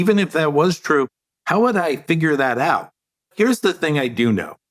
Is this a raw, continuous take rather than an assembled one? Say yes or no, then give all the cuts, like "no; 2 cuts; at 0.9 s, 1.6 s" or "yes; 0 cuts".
no; 1 cut; at 3.3 s